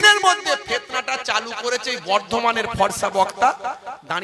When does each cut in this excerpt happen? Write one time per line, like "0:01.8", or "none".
none